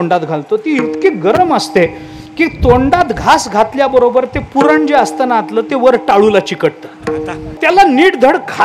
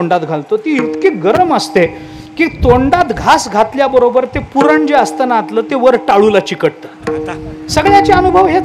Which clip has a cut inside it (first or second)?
first